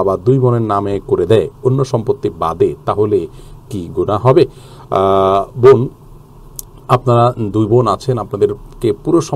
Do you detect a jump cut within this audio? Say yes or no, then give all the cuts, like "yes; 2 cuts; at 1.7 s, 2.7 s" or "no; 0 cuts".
no; 0 cuts